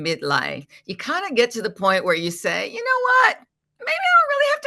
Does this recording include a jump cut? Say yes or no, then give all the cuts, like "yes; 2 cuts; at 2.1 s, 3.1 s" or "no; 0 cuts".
no; 0 cuts